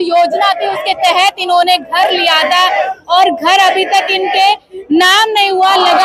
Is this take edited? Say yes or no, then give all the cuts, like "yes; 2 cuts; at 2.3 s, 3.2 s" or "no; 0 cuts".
no; 0 cuts